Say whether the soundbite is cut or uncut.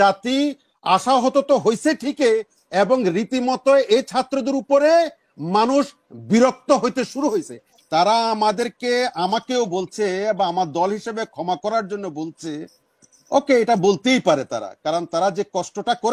cut